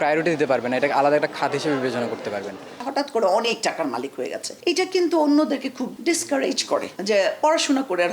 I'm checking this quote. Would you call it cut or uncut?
cut